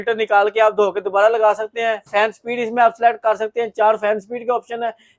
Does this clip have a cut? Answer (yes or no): no